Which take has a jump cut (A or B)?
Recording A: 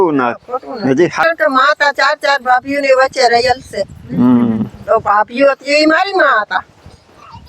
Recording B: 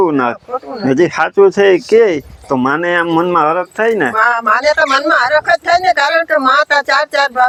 A